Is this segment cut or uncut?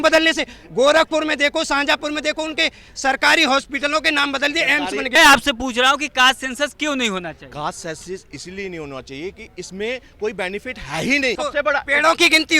cut